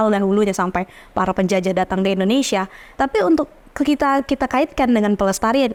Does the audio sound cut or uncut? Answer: uncut